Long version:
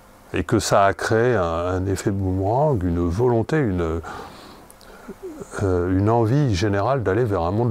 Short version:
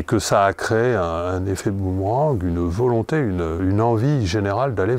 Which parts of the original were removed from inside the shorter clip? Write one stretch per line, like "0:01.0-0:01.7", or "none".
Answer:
0:04.0-0:05.9